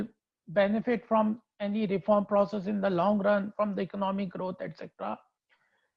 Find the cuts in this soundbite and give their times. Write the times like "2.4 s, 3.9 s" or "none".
none